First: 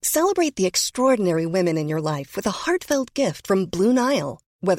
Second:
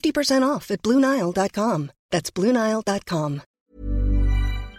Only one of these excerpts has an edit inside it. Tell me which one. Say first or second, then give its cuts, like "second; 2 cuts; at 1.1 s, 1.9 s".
second; 1 cut; at 3.5 s